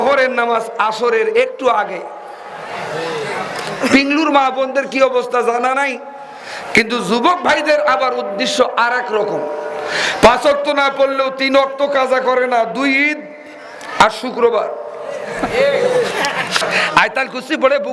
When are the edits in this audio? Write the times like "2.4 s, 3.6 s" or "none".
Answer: 16.7 s